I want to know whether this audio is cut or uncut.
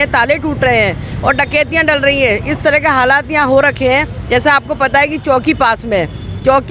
uncut